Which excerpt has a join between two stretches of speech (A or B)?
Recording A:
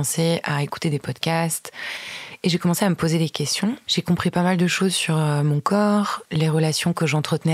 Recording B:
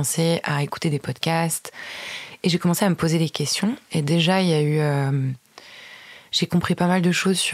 A